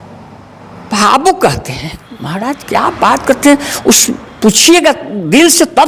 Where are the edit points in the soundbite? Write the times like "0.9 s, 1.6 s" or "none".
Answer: none

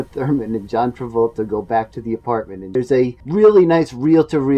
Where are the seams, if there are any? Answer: 2.9 s

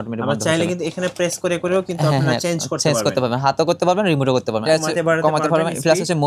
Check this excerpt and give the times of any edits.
4.6 s

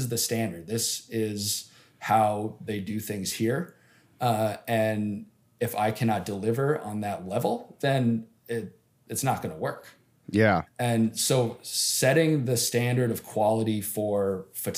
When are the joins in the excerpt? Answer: none

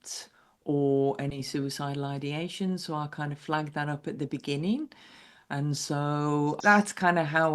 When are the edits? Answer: 6.6 s

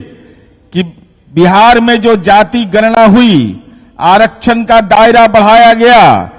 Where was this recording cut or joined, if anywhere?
none

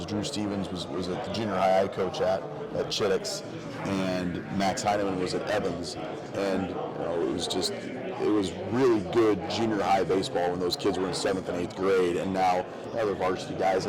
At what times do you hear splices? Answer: none

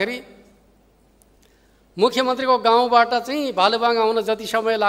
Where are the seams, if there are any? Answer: none

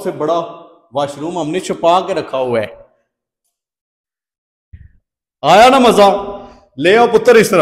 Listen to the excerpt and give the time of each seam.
none

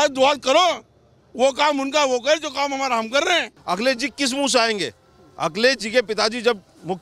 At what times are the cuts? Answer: 3.5 s

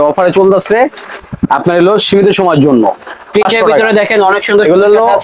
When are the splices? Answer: none

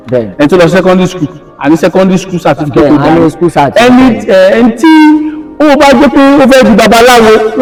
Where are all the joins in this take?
none

